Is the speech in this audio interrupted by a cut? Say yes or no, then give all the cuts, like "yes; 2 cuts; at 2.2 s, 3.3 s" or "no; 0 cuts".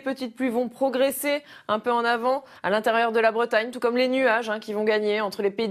yes; 1 cut; at 1.2 s